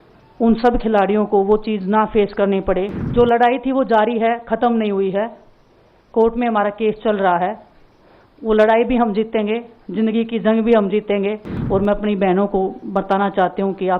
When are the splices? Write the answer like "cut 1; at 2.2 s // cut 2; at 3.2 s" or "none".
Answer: cut 1; at 3.0 s // cut 2; at 11.5 s